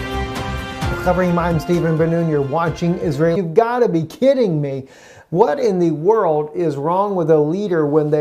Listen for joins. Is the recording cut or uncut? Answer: uncut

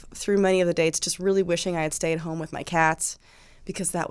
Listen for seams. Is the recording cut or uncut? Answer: uncut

